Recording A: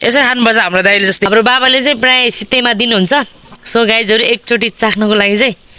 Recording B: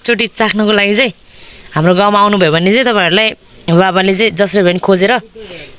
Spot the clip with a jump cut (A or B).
A